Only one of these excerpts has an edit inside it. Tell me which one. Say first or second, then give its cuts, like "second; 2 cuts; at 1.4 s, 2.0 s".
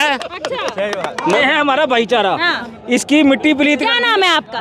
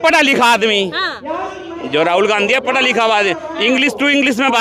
first; 1 cut; at 1.4 s